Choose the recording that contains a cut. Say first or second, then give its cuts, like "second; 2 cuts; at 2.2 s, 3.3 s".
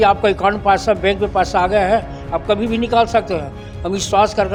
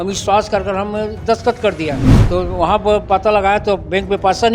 second; 1 cut; at 2.1 s